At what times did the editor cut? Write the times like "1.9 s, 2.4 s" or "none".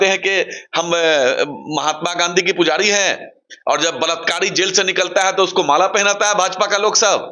none